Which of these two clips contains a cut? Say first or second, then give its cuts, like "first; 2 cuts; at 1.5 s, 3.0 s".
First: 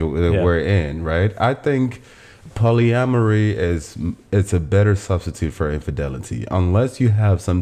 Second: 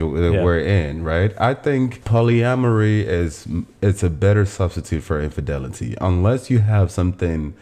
second; 1 cut; at 2.0 s